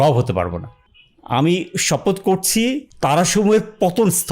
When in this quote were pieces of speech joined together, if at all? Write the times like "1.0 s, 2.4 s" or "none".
0.9 s, 2.9 s